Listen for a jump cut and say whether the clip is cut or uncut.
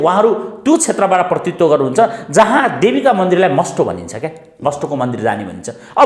uncut